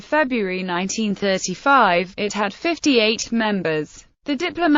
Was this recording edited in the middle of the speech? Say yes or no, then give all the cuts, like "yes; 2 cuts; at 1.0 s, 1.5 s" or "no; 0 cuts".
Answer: yes; 1 cut; at 2.6 s